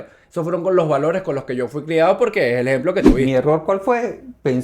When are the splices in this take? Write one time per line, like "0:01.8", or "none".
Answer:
0:03.2

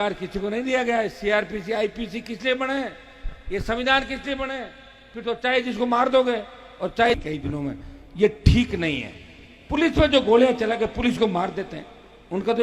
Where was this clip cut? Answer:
0:07.1

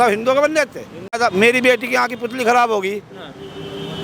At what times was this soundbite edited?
0:01.1

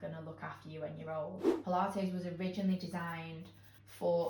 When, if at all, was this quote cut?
0:01.4

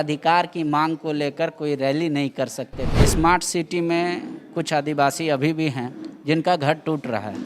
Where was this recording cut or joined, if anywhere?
0:02.8

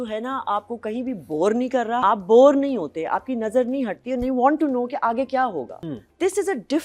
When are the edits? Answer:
0:02.0
0:05.8

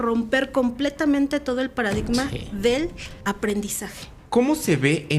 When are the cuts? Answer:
0:03.1
0:04.1

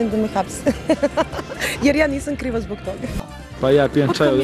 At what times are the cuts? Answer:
0:03.2

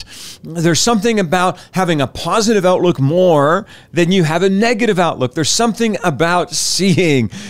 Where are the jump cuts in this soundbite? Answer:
none

